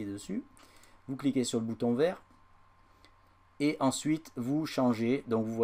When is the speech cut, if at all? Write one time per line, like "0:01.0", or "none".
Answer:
none